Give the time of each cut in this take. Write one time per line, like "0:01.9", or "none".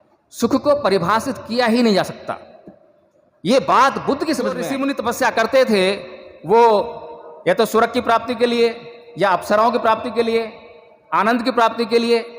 0:04.7